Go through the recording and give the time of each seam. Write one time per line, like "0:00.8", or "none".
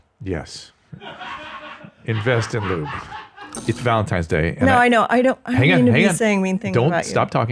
0:03.6